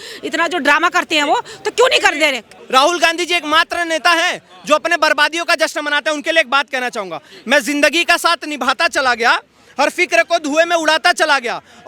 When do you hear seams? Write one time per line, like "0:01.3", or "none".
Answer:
0:02.5